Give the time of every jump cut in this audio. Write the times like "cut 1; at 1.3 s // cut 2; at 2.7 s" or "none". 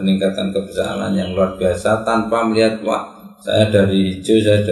none